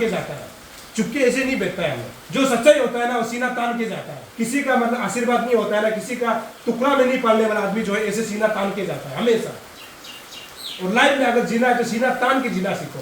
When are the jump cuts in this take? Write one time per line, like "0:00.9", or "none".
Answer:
0:02.1
0:04.2